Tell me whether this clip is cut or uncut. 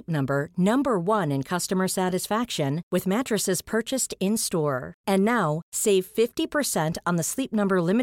uncut